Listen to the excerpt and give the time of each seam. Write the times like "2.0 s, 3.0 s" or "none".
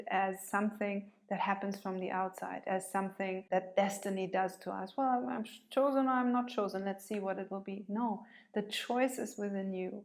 3.4 s